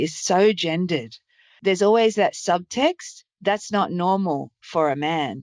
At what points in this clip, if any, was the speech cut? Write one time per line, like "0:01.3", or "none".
0:01.6